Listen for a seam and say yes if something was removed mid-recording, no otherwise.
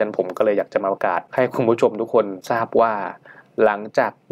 yes